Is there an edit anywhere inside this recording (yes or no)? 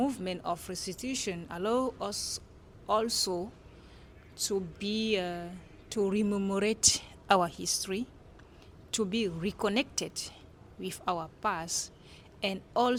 no